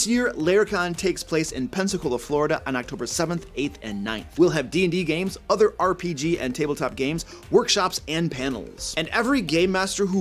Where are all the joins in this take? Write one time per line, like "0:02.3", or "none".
0:01.7